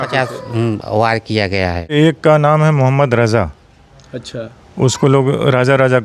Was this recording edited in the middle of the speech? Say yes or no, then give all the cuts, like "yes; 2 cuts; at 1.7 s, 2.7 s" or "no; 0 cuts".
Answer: yes; 1 cut; at 1.9 s